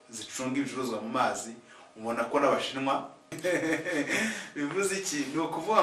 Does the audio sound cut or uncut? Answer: cut